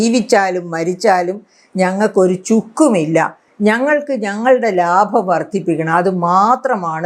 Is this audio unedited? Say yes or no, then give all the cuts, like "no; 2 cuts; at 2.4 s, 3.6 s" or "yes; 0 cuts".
yes; 0 cuts